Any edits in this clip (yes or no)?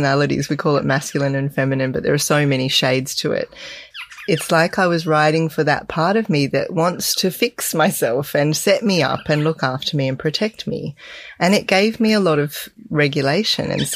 yes